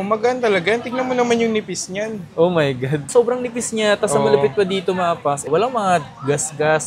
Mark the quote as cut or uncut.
uncut